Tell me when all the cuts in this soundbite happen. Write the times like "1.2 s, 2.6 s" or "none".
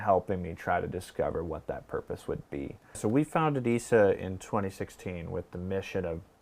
3.0 s